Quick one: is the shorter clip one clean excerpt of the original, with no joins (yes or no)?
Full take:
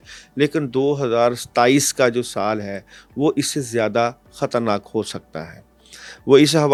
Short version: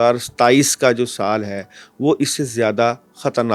yes